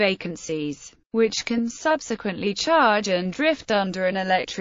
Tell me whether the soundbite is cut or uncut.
cut